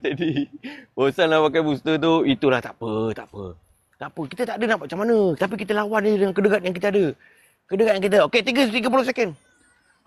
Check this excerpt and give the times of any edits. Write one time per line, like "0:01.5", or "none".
none